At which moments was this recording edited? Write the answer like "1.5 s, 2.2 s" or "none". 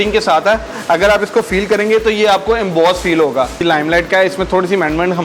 3.6 s

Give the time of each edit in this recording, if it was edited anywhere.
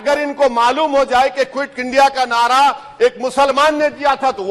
none

